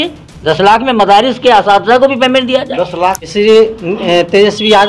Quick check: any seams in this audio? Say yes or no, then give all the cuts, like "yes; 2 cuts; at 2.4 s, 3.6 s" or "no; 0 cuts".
yes; 1 cut; at 3.2 s